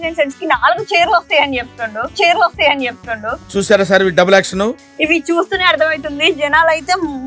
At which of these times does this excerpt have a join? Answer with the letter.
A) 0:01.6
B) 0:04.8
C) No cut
B